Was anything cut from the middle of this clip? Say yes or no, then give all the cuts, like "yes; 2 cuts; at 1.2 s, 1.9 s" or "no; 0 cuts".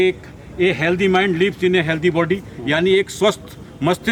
no; 0 cuts